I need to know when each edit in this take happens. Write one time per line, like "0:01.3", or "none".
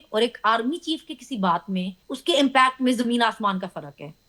0:02.0